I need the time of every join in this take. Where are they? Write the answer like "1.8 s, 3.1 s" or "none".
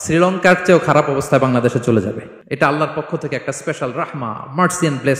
2.3 s